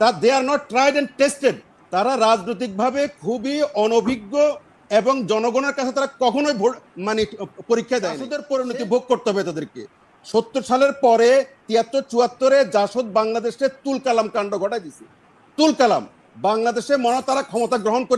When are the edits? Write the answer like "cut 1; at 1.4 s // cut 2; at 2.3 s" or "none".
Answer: cut 1; at 8.4 s